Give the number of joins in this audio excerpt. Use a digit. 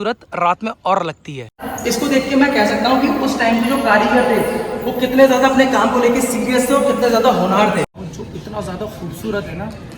2